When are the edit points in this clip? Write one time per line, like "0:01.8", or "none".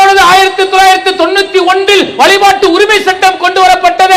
none